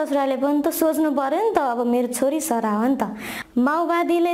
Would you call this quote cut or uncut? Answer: cut